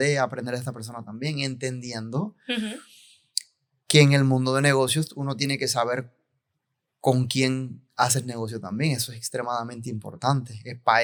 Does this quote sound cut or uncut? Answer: uncut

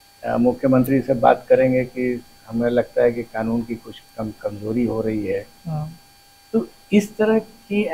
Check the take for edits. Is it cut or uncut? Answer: uncut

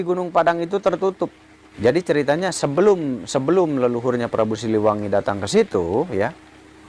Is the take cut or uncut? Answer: uncut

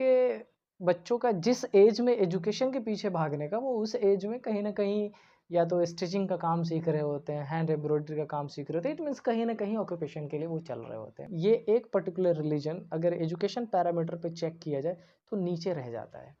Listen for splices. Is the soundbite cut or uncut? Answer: cut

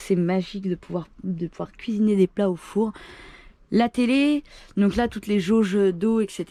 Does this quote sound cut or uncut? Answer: uncut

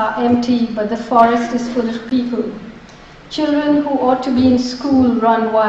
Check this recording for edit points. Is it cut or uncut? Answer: cut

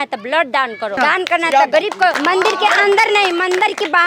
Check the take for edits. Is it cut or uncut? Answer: cut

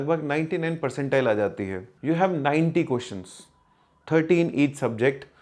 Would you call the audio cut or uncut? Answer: cut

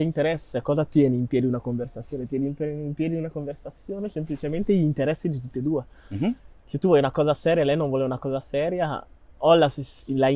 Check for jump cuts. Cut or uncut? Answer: uncut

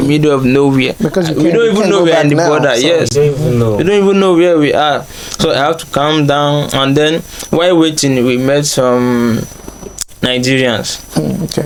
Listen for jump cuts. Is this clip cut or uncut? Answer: uncut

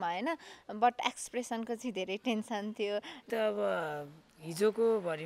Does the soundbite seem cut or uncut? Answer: cut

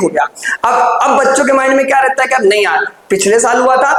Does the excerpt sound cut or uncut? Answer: uncut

